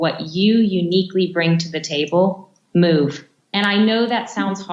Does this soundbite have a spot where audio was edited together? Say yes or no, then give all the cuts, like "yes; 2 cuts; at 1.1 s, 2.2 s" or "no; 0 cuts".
no; 0 cuts